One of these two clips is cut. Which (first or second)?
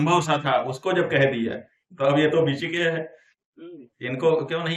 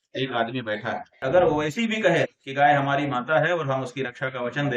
second